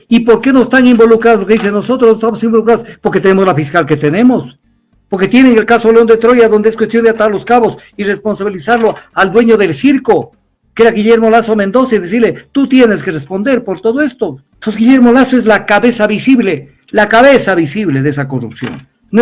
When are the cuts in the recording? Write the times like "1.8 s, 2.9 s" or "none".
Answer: 14.5 s